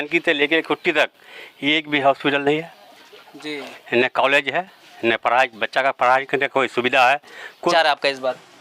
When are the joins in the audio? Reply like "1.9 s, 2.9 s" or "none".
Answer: 7.7 s